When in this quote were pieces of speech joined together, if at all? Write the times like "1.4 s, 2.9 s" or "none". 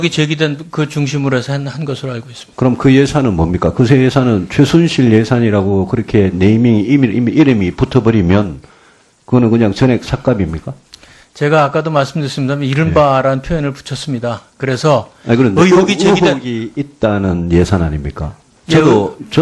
16.5 s